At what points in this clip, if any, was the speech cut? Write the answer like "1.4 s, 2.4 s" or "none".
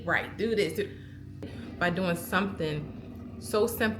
1.5 s

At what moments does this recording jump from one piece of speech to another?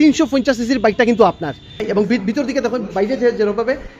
1.8 s

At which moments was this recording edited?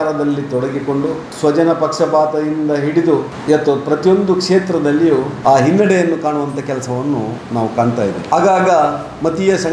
1.3 s, 3.3 s, 5.3 s, 8.3 s

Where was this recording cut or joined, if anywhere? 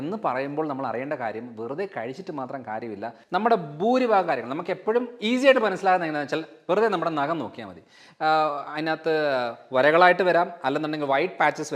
3.2 s

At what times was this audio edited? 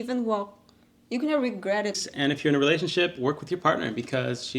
2.1 s

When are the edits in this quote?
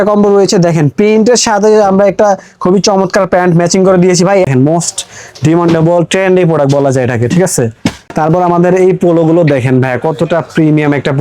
4.5 s, 8.1 s

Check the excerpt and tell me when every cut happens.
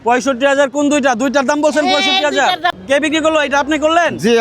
2.8 s

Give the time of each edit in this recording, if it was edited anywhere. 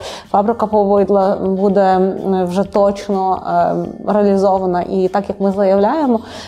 none

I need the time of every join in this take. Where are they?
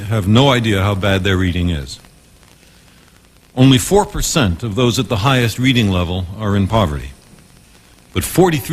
6.0 s

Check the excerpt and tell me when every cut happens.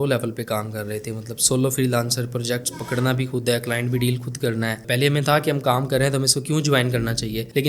4.8 s

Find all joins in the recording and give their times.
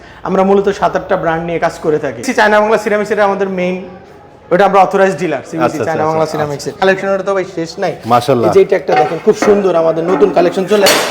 2.2 s, 6.8 s

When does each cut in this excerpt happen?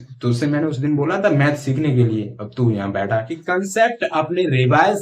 3.4 s

